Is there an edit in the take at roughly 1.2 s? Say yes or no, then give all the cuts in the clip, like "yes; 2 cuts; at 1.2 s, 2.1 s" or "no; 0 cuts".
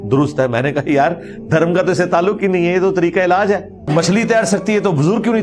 no; 1 cut; at 3.9 s